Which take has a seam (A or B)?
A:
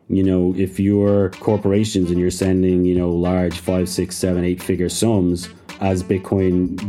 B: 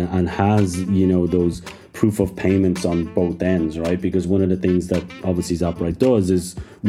A